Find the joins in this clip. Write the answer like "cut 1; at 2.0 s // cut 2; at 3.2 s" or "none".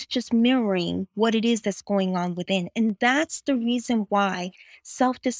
none

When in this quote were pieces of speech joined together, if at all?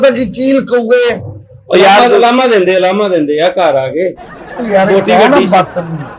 none

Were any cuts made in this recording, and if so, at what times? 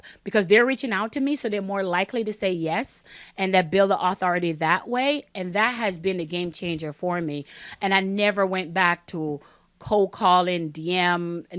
none

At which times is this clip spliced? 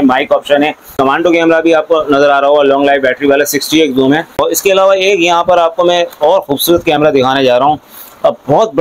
cut 1; at 1.0 s // cut 2; at 4.4 s

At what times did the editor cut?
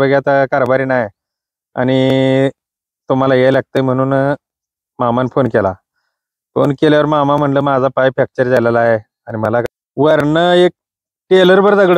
cut 1; at 9.6 s

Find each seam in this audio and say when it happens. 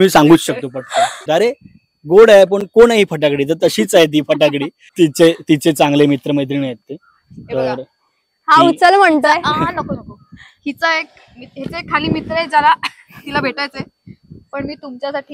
cut 1; at 1.2 s // cut 2; at 4.8 s

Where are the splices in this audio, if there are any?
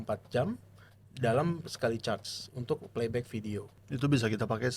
cut 1; at 3.7 s

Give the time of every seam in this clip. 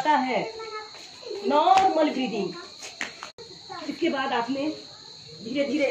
cut 1; at 3.2 s

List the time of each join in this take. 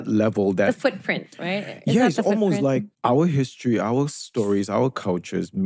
none

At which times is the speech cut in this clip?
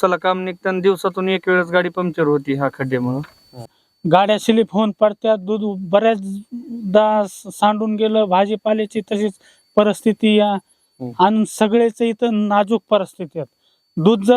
cut 1; at 3.8 s

